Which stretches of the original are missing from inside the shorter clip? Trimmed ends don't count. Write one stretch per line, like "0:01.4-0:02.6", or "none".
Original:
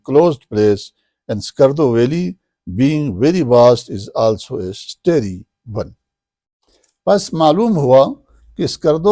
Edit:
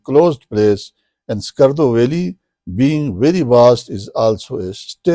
none